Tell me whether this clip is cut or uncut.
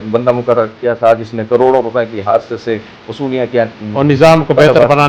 uncut